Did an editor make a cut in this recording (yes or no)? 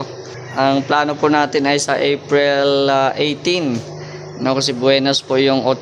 no